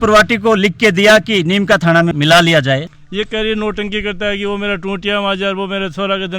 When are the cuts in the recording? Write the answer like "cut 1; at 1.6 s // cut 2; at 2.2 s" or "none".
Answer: cut 1; at 2.8 s